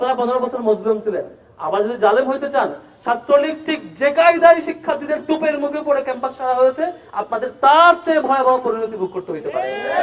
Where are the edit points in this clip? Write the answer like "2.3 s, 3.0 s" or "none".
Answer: none